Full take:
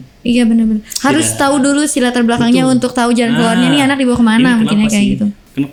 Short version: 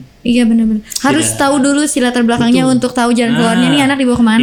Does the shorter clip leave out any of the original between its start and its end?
no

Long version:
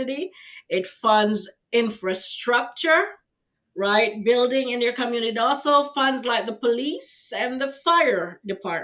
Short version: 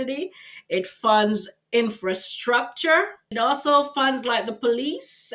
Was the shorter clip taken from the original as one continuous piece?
no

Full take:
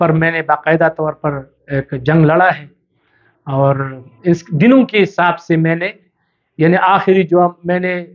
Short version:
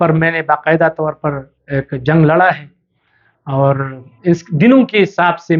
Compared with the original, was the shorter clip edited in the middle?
no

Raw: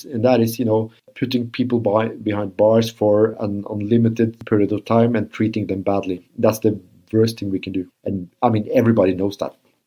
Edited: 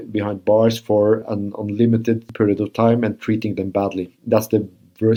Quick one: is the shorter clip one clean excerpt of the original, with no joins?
yes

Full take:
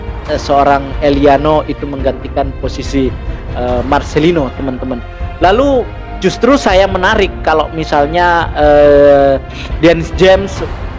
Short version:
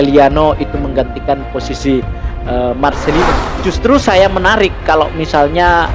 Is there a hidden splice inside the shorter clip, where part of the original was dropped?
yes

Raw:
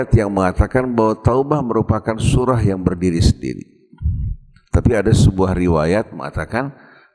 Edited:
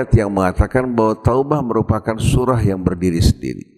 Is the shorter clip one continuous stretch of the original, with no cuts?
yes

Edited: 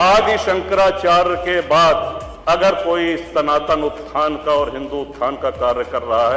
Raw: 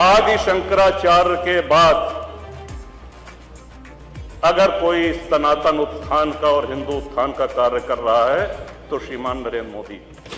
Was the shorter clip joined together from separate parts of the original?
yes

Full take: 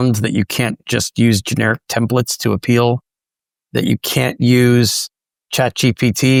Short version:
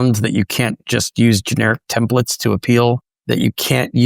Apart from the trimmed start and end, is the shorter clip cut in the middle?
yes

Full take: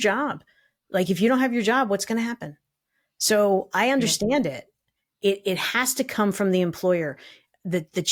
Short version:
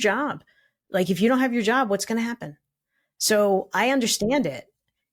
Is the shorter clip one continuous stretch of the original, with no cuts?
yes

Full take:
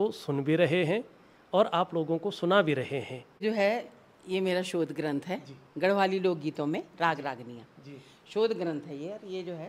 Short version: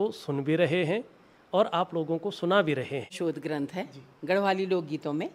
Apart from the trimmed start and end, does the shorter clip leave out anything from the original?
yes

